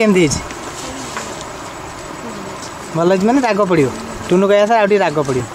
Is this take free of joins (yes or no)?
yes